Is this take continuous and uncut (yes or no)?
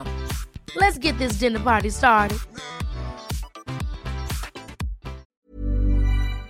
no